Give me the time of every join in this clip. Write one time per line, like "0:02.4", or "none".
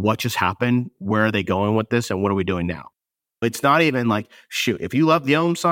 none